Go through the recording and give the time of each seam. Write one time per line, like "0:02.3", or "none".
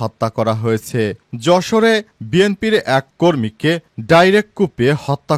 none